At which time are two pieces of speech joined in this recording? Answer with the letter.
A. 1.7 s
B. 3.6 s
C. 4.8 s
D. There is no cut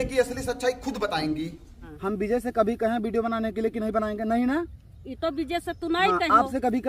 A